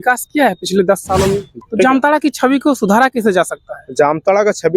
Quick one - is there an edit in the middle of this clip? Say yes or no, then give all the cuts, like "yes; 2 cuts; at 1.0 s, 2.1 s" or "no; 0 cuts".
yes; 1 cut; at 1.5 s